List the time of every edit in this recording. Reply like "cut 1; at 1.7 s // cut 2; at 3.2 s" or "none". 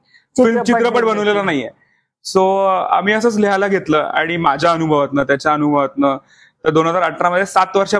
none